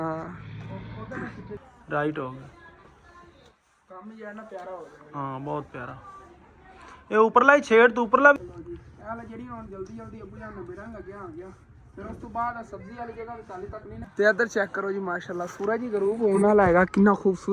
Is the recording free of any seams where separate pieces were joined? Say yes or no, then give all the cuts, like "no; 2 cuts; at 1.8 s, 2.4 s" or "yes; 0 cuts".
no; 3 cuts; at 1.6 s, 8.4 s, 14.0 s